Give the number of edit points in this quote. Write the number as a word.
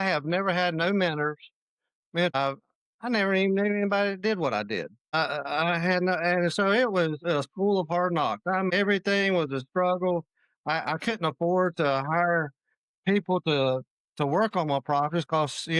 three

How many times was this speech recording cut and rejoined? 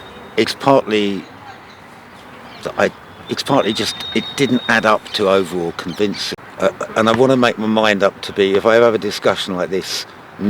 one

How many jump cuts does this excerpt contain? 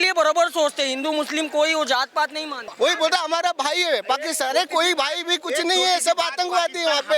one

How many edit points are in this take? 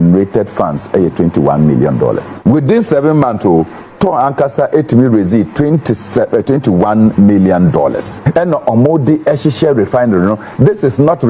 two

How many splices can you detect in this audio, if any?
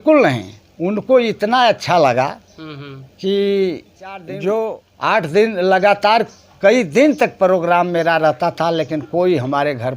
one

